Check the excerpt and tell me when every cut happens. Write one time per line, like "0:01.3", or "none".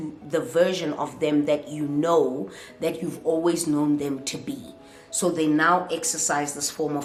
none